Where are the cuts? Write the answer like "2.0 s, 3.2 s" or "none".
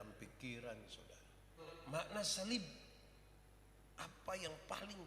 1.7 s